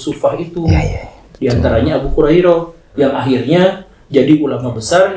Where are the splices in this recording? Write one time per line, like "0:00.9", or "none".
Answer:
none